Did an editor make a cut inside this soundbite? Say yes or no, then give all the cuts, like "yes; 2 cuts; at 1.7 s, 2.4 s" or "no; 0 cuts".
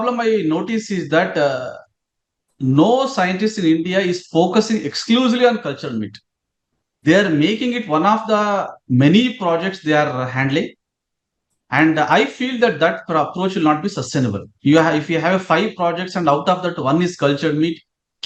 no; 0 cuts